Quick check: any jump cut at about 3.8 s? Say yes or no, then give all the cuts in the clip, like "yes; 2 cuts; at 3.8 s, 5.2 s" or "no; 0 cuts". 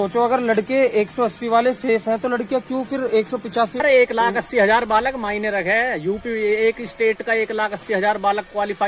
yes; 1 cut; at 3.8 s